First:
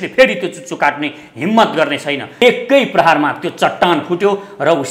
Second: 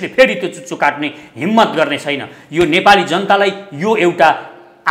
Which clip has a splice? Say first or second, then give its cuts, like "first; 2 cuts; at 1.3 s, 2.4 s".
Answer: first; 1 cut; at 2.3 s